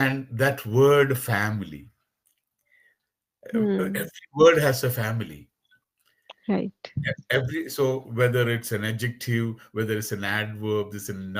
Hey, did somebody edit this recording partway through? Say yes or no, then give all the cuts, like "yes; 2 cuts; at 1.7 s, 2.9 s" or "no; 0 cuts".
no; 0 cuts